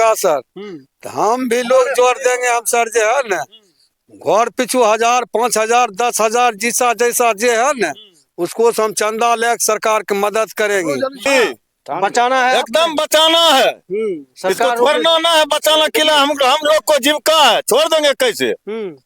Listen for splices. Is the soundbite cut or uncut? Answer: cut